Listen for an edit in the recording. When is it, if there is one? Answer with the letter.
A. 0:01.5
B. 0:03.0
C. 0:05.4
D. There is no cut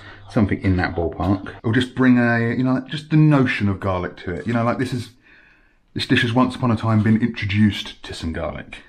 A